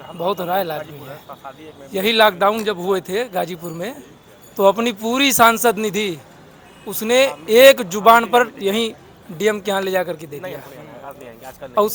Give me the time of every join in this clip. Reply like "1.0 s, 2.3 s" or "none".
none